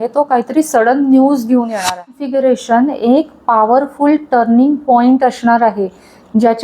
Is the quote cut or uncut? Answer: cut